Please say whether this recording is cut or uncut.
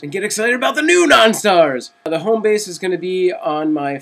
cut